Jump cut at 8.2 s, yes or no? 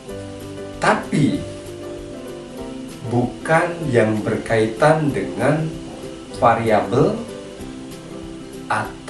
no